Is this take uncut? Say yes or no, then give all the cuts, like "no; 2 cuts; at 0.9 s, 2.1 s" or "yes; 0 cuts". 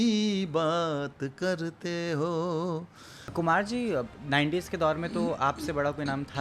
no; 1 cut; at 3.3 s